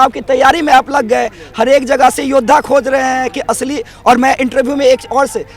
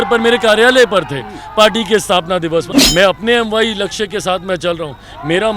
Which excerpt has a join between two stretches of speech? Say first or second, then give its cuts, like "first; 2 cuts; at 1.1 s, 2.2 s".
second; 1 cut; at 2.7 s